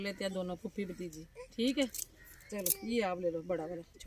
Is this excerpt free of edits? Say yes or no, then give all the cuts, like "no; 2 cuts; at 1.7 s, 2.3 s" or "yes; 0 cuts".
yes; 0 cuts